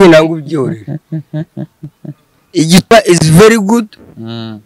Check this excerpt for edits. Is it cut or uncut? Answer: uncut